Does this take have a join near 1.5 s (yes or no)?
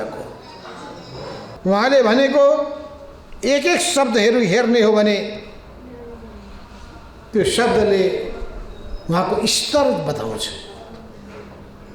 yes